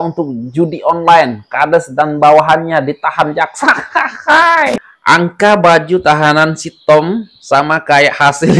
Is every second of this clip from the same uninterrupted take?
no; 1 cut; at 4.8 s

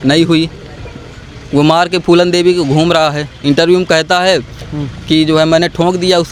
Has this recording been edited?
no; 0 cuts

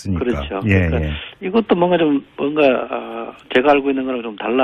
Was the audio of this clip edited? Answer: no; 0 cuts

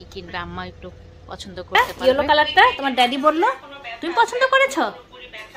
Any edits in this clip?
yes; 1 cut; at 1.7 s

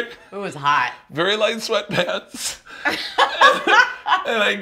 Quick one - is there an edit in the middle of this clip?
no; 0 cuts

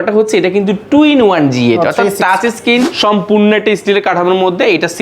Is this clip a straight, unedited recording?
no; 1 cut; at 2.9 s

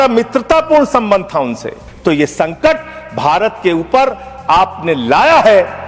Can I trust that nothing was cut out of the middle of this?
no; 1 cut; at 1.9 s

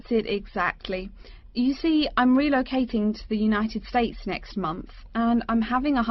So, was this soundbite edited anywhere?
no; 0 cuts

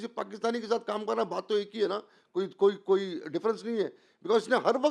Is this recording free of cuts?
yes; 0 cuts

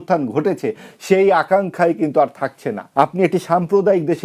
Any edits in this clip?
yes; 1 cut; at 2.8 s

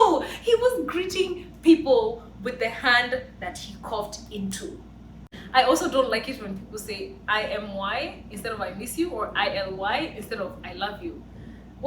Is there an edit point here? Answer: yes; 1 cut; at 5.3 s

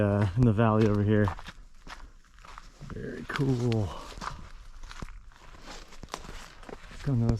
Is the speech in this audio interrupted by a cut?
no; 0 cuts

